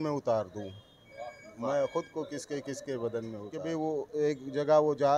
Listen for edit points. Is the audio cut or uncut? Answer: cut